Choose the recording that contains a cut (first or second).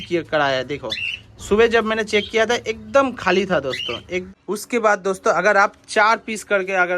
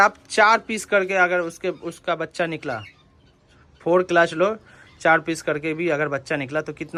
first